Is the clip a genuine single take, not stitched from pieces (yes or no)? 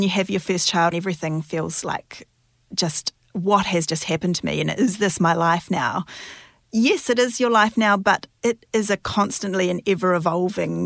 no